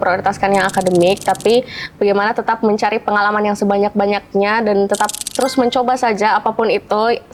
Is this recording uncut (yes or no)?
yes